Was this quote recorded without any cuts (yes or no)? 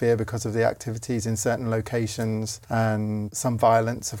no